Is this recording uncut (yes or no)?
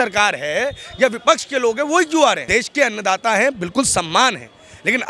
no